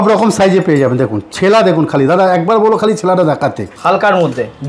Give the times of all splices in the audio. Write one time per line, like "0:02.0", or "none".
0:03.7